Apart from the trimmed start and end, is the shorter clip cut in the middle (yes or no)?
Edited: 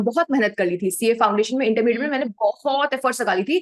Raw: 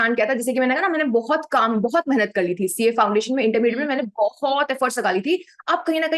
no